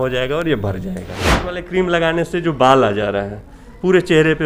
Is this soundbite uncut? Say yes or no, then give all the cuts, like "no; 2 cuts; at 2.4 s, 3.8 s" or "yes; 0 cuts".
no; 1 cut; at 1.5 s